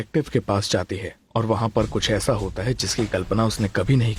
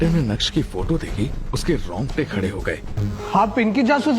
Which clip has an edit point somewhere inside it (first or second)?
second